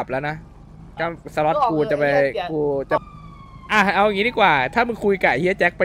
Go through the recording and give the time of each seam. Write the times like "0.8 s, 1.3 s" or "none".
3.0 s